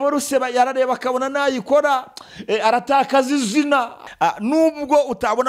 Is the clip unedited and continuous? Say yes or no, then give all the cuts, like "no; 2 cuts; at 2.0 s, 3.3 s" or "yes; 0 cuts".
no; 1 cut; at 4.0 s